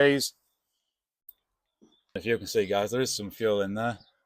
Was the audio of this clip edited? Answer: yes; 1 cut; at 2.1 s

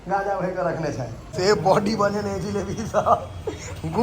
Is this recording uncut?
no; 1 cut; at 1.2 s

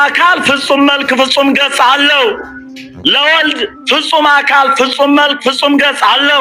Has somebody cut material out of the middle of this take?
no; 0 cuts

